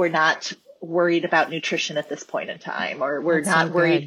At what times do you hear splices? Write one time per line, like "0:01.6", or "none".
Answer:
none